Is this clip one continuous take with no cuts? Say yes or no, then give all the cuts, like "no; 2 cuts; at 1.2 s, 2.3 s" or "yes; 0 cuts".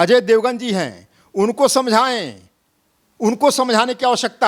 yes; 0 cuts